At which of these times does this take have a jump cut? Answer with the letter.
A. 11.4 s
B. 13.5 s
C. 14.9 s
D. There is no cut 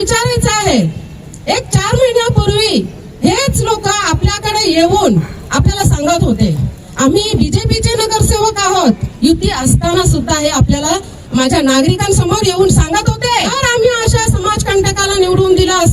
B